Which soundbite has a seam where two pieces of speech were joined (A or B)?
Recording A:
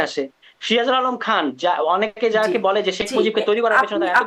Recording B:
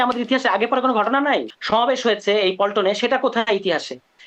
B